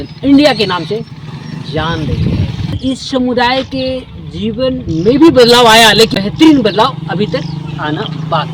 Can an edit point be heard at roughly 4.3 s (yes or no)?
no